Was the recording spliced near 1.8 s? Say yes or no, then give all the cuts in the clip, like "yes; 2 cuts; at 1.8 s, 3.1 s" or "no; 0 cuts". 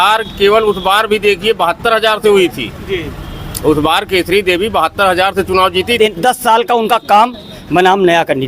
no; 1 cut; at 6.0 s